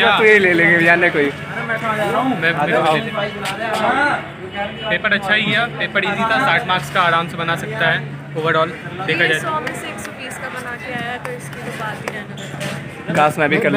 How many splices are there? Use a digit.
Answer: 0